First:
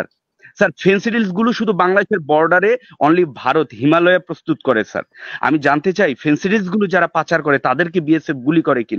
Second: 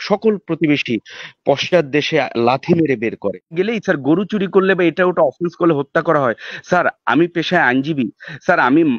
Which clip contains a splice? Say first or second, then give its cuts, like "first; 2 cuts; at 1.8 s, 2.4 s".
second; 1 cut; at 3.5 s